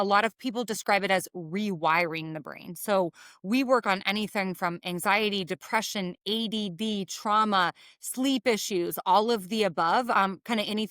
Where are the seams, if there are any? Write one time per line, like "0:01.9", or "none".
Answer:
none